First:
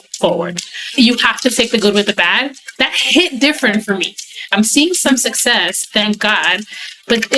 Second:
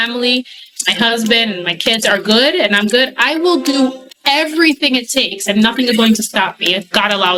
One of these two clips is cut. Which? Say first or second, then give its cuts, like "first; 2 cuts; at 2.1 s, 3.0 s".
first; 3 cuts; at 1.0 s, 2.7 s, 4.5 s